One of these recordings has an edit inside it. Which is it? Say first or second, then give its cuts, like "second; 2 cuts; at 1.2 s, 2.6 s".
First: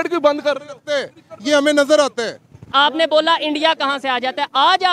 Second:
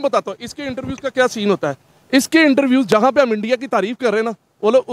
first; 1 cut; at 2.7 s